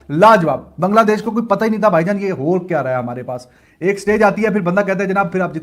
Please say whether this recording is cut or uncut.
uncut